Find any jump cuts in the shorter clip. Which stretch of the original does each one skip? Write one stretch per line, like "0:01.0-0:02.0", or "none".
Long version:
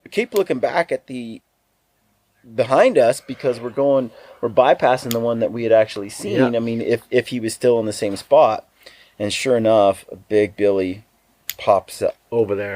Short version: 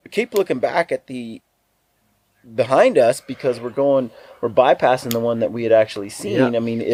none